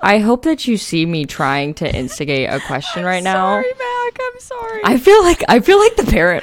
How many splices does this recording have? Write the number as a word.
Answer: one